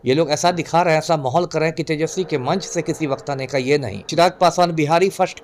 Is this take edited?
yes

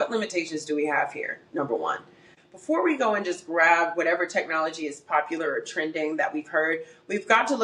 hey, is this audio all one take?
no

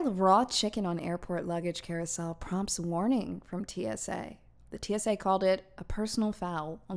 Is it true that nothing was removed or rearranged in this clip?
yes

